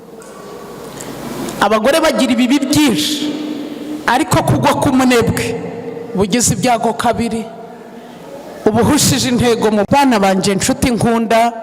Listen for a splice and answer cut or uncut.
cut